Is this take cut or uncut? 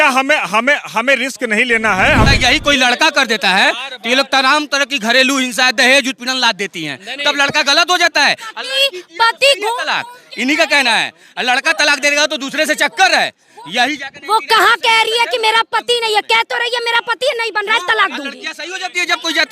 cut